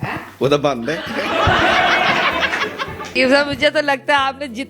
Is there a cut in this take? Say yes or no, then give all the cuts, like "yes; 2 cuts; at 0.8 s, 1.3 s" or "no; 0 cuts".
yes; 1 cut; at 3.1 s